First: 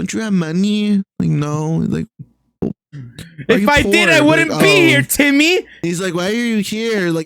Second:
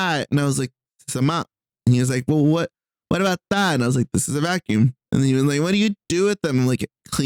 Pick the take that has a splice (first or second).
first